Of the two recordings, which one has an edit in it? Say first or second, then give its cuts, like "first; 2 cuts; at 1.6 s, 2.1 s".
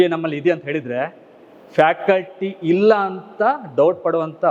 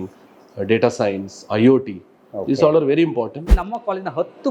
second; 1 cut; at 3.5 s